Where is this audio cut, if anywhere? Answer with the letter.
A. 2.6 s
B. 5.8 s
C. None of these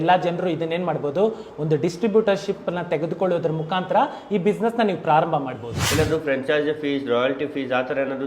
B